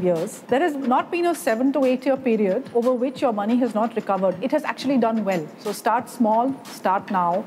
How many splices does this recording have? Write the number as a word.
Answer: four